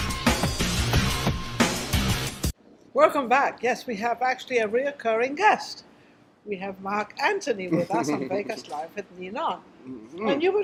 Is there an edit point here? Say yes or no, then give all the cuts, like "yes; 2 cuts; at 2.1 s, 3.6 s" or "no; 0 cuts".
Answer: no; 0 cuts